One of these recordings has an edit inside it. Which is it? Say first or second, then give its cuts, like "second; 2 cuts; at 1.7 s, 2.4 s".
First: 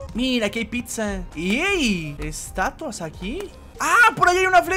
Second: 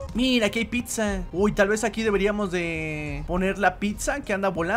first; 2 cuts; at 1.3 s, 3.6 s